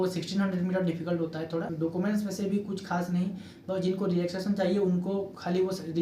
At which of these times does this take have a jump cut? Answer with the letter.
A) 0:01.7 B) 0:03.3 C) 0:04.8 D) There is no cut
A